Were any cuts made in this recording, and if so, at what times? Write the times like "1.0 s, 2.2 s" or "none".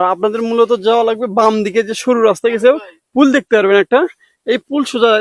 none